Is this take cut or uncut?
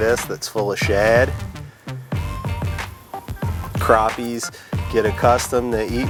uncut